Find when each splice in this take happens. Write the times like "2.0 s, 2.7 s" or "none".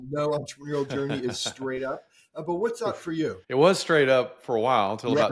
3.4 s